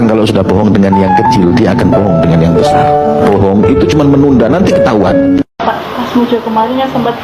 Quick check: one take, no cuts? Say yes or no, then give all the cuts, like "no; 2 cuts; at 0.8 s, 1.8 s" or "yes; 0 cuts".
no; 1 cut; at 3.2 s